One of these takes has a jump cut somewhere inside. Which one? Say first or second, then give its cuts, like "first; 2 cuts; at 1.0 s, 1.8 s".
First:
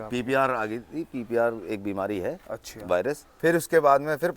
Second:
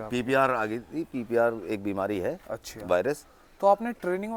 first; 1 cut; at 3.2 s